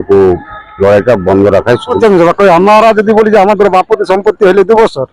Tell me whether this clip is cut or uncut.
cut